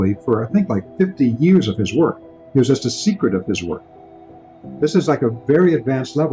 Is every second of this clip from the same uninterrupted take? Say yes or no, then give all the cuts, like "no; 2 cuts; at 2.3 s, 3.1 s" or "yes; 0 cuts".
no; 1 cut; at 4.2 s